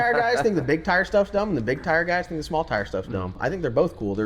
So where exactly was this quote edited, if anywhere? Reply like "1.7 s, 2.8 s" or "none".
3.4 s